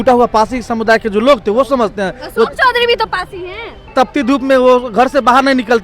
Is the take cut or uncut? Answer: cut